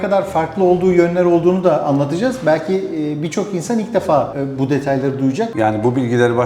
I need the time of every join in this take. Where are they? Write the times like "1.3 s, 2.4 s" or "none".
5.5 s